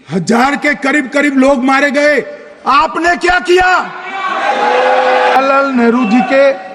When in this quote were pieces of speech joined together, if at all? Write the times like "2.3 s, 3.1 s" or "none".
5.4 s